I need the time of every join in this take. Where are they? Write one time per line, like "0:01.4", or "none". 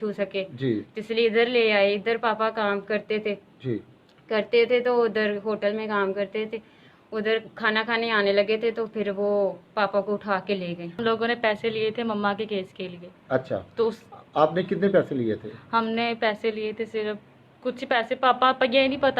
0:11.0